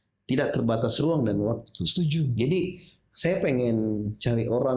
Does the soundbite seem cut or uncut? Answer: uncut